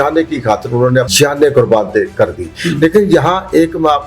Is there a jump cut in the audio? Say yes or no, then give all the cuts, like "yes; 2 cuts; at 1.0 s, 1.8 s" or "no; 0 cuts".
yes; 1 cut; at 1.1 s